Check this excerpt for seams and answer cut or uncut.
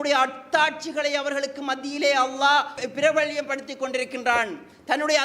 cut